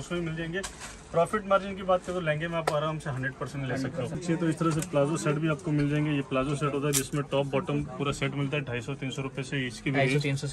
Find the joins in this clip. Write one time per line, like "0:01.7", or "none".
0:04.2

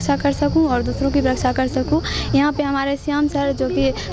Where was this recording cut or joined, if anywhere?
none

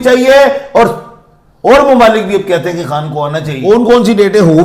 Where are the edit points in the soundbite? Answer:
0:03.5

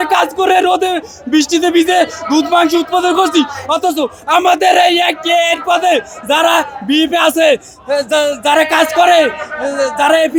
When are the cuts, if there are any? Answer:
none

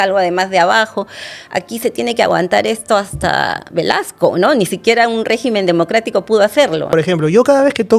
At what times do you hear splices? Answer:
0:06.9

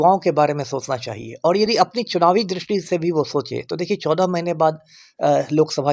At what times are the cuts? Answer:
none

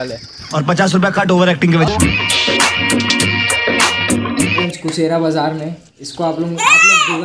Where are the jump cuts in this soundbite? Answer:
0:04.6

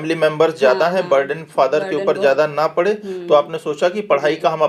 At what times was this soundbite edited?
none

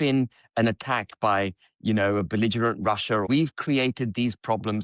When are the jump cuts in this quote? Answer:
0:03.3

